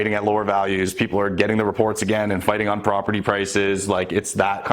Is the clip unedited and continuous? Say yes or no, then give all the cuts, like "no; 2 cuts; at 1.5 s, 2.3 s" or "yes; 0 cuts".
yes; 0 cuts